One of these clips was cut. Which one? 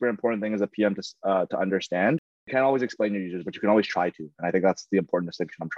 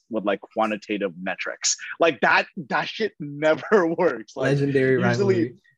first; 1 cut; at 2.4 s

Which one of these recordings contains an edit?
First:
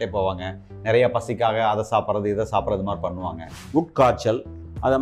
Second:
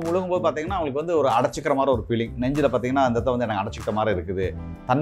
first; 1 cut; at 3.6 s

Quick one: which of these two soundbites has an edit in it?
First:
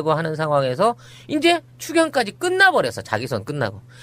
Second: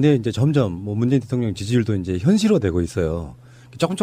first; 1 cut; at 2.3 s

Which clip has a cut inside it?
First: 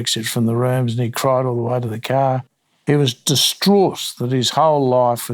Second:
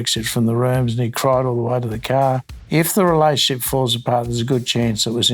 second; 1 cut; at 2.5 s

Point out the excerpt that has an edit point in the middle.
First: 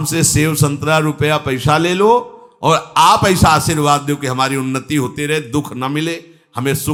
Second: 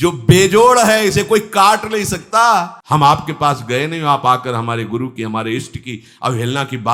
second; 1 cut; at 2.8 s

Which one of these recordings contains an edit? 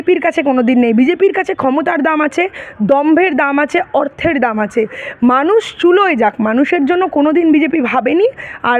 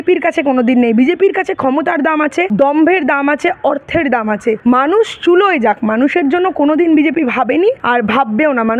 second; 3 cuts; at 2.5 s, 4.6 s, 7.8 s

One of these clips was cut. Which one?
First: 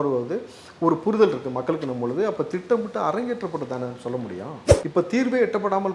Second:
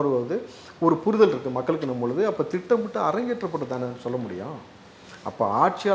first; 1 cut; at 4.6 s

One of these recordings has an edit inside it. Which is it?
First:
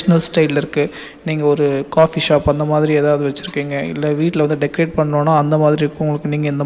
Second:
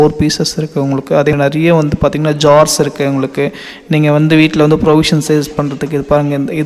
second; 1 cut; at 1.3 s

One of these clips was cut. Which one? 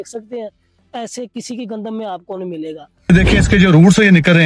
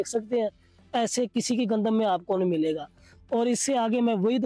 first; 1 cut; at 3.1 s

